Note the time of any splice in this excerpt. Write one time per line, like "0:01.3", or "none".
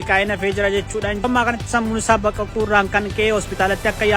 0:01.2